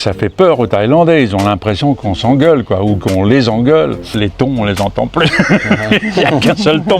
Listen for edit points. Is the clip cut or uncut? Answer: cut